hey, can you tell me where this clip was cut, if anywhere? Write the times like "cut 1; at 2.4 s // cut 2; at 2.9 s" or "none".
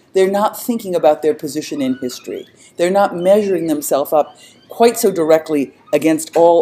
cut 1; at 4.9 s